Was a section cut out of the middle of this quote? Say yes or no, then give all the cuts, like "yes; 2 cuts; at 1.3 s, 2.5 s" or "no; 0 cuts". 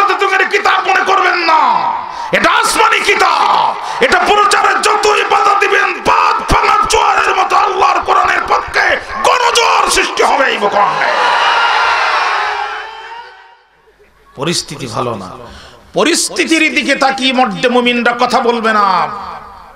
yes; 1 cut; at 13.7 s